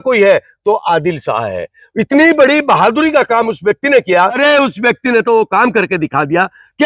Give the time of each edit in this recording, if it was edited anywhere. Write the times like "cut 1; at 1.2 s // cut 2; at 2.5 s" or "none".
cut 1; at 4.4 s